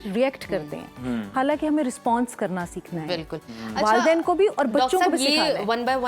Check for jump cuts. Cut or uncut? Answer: uncut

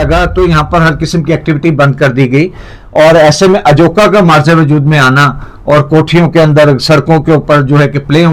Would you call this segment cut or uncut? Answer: uncut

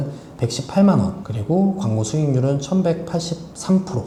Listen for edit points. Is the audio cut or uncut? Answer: uncut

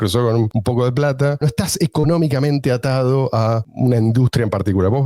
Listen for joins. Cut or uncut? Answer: cut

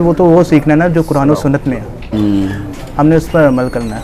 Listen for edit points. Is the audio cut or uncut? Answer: uncut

